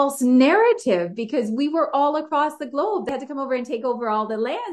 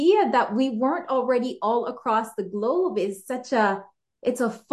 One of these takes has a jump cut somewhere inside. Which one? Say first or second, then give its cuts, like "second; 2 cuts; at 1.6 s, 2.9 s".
first; 1 cut; at 3.1 s